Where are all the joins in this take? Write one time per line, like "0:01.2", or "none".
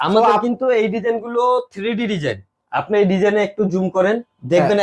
none